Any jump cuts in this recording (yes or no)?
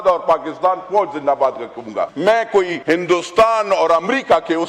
yes